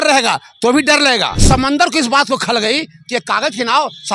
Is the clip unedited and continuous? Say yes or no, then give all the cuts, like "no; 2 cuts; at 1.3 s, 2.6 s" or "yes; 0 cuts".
no; 1 cut; at 1.4 s